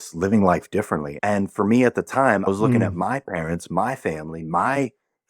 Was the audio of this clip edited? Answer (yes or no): yes